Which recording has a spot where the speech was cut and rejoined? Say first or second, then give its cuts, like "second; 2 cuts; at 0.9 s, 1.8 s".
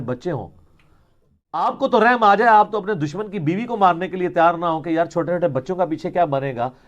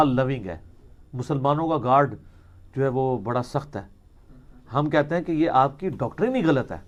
first; 1 cut; at 1.6 s